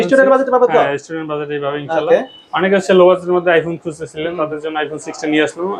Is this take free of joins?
yes; 0 cuts

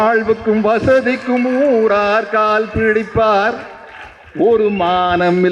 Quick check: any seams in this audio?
no; 0 cuts

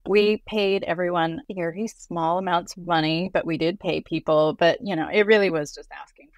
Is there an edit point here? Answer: no; 0 cuts

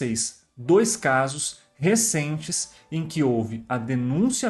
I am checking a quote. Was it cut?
no; 0 cuts

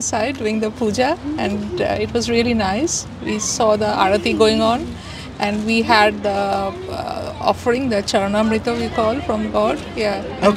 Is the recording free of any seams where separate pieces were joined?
yes; 0 cuts

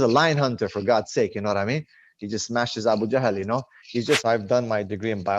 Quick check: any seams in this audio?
yes; 1 cut; at 4.2 s

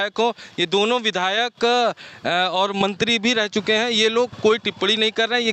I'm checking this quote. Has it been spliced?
no; 0 cuts

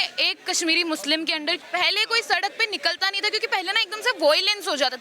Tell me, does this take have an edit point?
yes; 1 cut; at 1.6 s

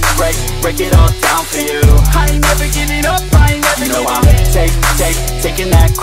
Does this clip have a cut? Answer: no; 0 cuts

